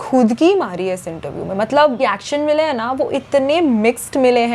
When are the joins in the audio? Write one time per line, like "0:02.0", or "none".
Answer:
none